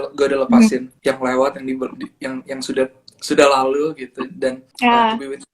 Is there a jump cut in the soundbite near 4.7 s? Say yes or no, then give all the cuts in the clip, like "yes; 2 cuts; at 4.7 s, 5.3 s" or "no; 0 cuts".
yes; 2 cuts; at 0.9 s, 4.7 s